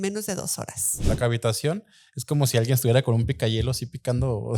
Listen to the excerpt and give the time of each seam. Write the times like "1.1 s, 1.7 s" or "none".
1.0 s

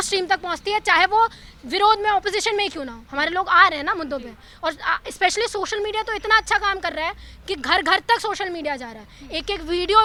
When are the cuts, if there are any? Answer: none

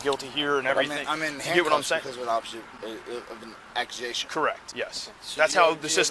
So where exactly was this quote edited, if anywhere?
4.6 s

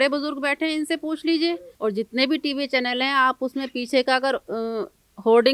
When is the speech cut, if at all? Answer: 1.7 s

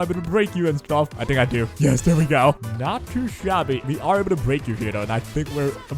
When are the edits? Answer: 1.1 s, 2.6 s, 3.8 s

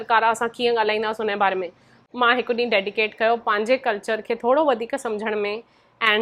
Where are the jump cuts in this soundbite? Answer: 2.1 s

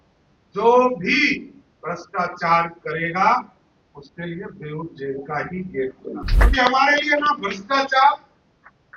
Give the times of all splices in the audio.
6.3 s

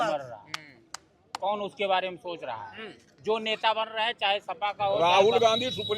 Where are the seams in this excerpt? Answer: 5.0 s

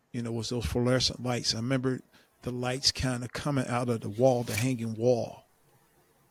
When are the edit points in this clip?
none

